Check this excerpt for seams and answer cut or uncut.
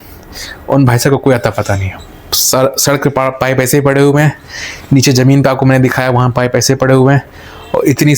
uncut